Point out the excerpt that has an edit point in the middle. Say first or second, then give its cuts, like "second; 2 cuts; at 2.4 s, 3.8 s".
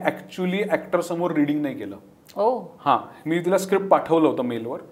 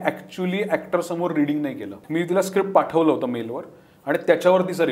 second; 1 cut; at 2.0 s